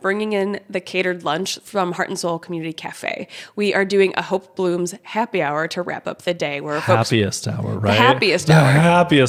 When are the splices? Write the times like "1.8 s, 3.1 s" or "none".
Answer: none